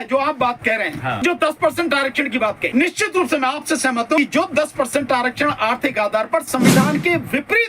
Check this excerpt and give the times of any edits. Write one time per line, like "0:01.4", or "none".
0:01.2
0:02.6
0:04.2